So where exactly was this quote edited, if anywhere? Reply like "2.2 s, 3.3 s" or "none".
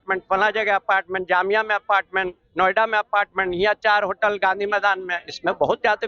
none